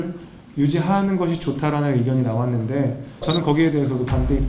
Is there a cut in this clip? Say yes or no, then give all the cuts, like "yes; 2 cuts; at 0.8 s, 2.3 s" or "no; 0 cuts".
yes; 1 cut; at 3.2 s